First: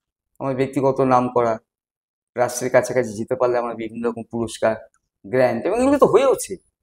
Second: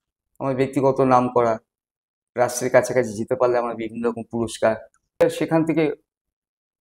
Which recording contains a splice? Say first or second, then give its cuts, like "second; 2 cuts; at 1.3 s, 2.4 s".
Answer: second; 1 cut; at 5.2 s